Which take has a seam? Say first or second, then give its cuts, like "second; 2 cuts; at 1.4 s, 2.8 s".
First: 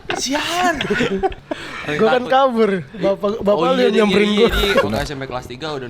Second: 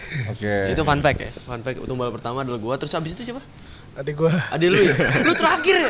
first; 2 cuts; at 1.4 s, 4.9 s